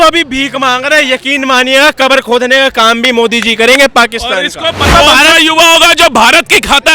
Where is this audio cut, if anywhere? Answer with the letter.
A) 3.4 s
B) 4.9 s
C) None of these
B